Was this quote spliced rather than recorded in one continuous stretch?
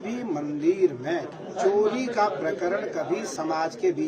yes; 2 cuts; at 1.4 s, 3.3 s

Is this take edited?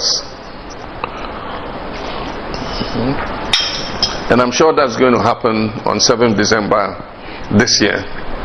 no; 0 cuts

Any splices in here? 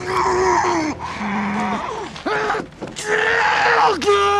no; 0 cuts

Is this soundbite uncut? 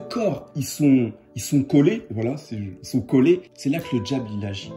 yes; 0 cuts

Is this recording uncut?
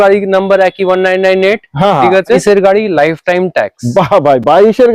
no; 1 cut; at 2.4 s

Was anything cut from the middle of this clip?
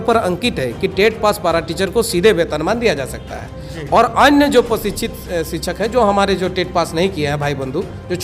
no; 0 cuts

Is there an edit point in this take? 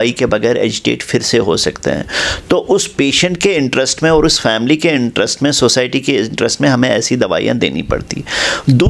no; 0 cuts

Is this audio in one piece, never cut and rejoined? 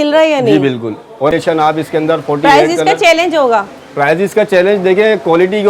no; 1 cut; at 1.3 s

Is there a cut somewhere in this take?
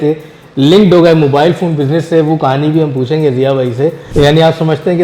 yes; 1 cut; at 4.0 s

